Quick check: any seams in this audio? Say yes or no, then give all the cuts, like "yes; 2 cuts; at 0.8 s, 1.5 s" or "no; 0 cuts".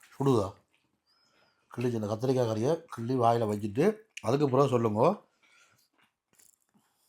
no; 0 cuts